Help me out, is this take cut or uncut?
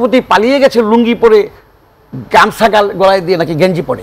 uncut